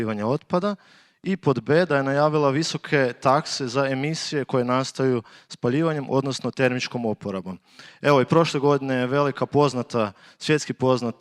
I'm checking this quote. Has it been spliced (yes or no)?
no